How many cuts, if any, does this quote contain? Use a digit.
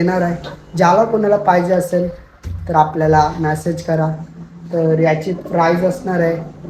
0